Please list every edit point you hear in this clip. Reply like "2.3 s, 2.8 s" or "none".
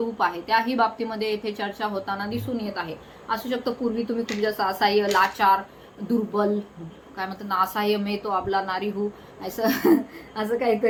none